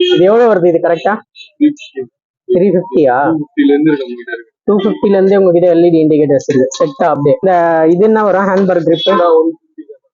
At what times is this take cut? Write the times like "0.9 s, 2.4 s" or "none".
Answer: 7.4 s